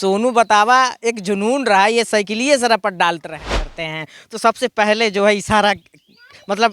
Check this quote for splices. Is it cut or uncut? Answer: cut